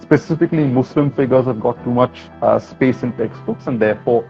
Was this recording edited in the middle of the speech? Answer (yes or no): no